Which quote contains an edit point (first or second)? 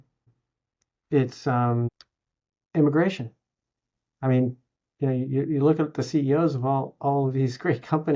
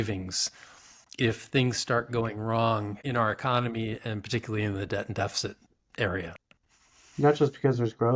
second